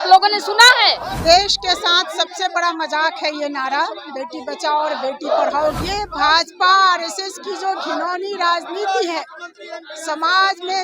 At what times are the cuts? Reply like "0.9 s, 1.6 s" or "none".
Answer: 1.1 s, 5.8 s

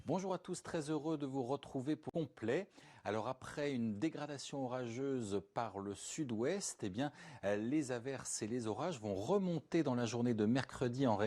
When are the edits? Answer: 2.1 s

